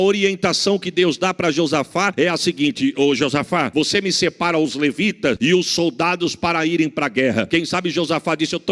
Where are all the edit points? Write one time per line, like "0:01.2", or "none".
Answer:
0:02.1
0:03.7
0:05.4
0:07.5